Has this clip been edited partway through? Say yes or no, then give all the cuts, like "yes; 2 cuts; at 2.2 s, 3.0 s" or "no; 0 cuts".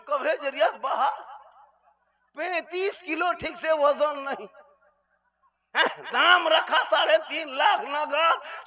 no; 0 cuts